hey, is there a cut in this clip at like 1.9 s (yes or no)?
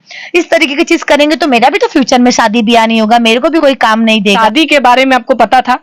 no